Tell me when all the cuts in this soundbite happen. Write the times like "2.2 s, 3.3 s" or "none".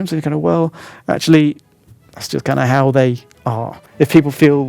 3.8 s